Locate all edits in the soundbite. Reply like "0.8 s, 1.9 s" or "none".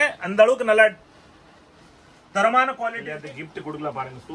3.1 s